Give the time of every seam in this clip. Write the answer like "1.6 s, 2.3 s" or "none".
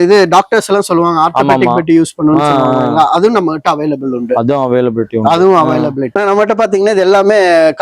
6.1 s